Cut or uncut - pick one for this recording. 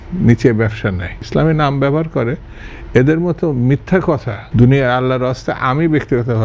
cut